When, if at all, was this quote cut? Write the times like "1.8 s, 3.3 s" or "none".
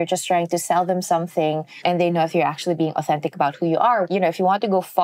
1.7 s, 4.1 s